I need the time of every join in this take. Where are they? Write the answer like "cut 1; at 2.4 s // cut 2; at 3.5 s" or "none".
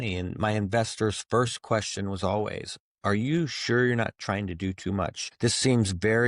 cut 1; at 5.2 s